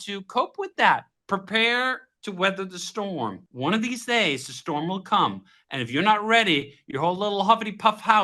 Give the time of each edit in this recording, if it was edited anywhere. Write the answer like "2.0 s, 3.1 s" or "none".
1.1 s, 3.4 s